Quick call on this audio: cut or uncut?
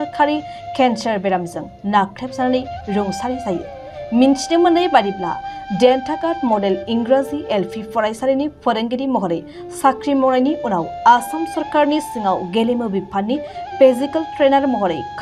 uncut